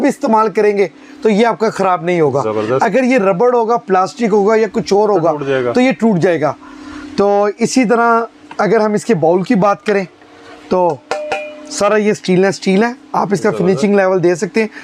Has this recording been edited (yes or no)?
no